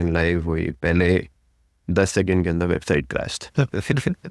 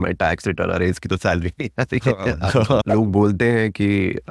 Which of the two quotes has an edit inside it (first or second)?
second